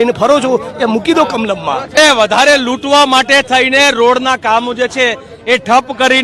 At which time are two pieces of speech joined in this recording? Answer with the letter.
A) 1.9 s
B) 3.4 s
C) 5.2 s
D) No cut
A